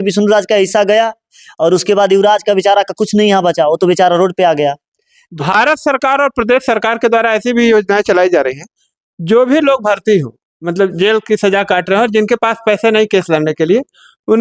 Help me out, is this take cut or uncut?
uncut